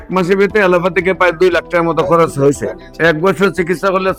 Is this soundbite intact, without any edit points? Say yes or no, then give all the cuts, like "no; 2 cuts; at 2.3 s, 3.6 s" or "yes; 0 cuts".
yes; 0 cuts